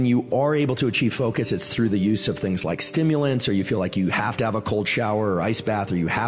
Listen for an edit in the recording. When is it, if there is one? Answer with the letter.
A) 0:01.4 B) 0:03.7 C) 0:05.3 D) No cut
D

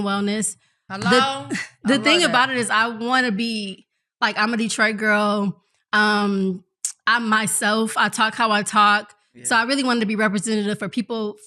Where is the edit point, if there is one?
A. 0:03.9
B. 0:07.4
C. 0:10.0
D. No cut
D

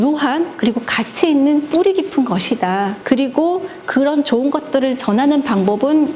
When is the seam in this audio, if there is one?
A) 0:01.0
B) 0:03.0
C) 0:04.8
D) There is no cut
B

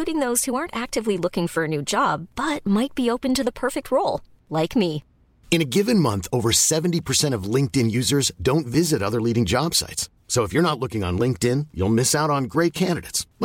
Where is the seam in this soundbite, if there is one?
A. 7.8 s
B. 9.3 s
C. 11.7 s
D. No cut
D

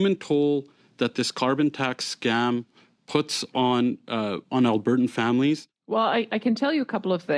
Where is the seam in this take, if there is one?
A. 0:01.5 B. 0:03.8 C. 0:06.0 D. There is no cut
C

